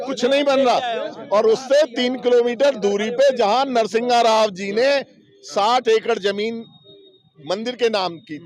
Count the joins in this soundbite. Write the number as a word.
zero